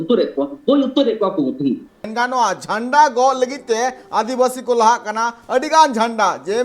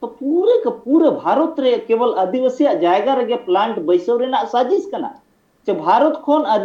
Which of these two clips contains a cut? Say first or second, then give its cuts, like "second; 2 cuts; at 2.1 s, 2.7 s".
first; 1 cut; at 2.0 s